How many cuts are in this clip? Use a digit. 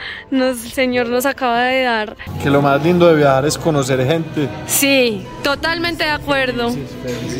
1